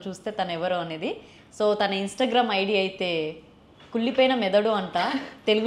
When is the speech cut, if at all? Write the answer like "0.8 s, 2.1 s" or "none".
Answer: none